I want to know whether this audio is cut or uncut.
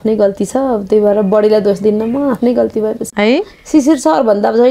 cut